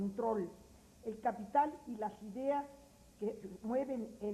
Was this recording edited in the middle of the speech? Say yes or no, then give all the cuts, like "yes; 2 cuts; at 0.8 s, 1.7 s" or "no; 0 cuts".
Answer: no; 0 cuts